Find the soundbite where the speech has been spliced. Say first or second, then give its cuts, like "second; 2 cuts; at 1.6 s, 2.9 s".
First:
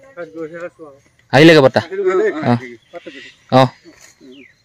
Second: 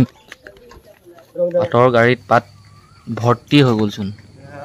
second; 1 cut; at 1.7 s